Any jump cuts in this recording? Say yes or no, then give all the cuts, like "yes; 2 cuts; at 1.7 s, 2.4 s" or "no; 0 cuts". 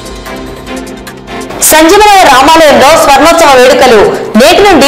yes; 1 cut; at 1.5 s